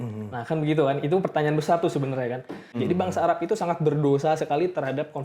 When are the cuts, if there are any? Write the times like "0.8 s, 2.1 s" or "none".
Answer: 2.8 s